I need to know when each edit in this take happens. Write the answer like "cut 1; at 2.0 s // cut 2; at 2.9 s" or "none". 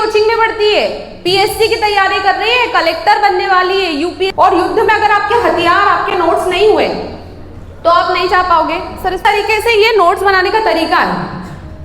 cut 1; at 4.3 s // cut 2; at 9.2 s